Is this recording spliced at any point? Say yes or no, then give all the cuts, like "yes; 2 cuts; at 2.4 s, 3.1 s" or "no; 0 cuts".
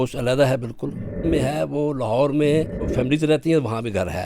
yes; 2 cuts; at 1.2 s, 2.8 s